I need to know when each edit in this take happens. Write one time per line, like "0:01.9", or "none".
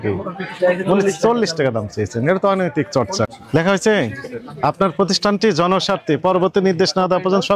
0:03.4